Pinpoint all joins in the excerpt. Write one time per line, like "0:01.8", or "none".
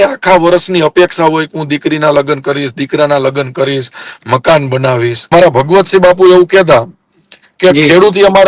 0:05.3